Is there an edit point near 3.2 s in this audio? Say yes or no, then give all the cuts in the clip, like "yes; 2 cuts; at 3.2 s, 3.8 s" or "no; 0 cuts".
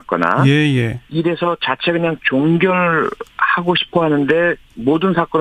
no; 1 cut; at 1.0 s